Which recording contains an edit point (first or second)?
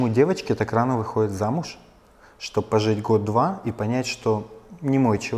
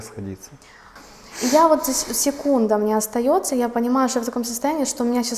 second